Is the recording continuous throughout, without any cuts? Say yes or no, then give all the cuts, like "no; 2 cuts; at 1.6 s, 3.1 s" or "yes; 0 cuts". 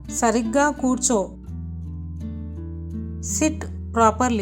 yes; 0 cuts